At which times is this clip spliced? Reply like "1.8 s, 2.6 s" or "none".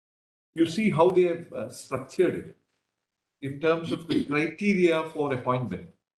none